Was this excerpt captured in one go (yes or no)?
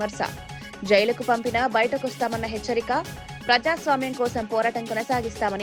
yes